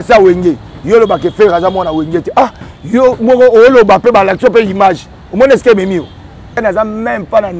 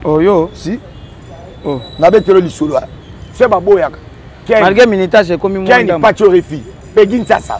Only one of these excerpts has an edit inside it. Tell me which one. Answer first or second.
first